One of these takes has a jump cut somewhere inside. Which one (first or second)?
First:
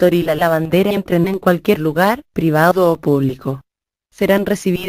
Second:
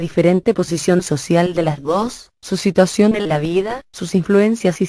second